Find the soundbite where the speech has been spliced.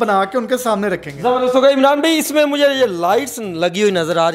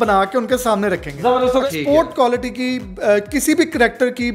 second; 1 cut; at 1.6 s

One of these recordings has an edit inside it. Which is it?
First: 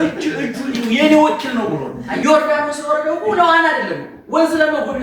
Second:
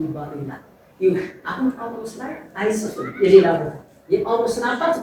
first; 1 cut; at 2.1 s

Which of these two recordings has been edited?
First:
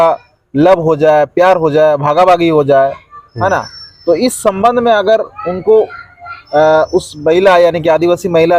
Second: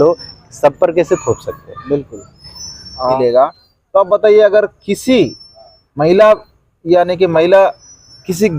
second; 1 cut; at 3.2 s

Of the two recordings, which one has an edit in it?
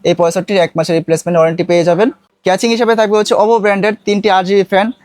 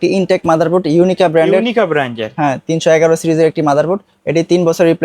first; 1 cut; at 2.3 s

